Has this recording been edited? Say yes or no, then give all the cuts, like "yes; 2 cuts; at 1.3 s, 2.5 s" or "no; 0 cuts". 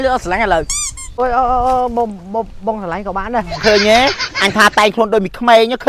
yes; 2 cuts; at 1.2 s, 3.6 s